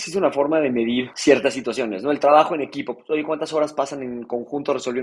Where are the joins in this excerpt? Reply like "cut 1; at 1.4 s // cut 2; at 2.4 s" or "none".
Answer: cut 1; at 1.1 s